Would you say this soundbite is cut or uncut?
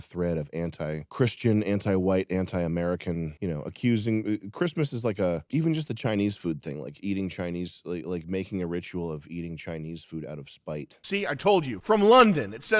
cut